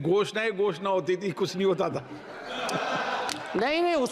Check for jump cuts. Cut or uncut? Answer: uncut